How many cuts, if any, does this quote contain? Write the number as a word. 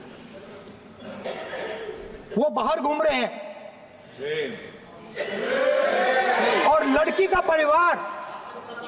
zero